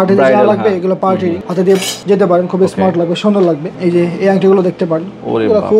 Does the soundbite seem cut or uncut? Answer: cut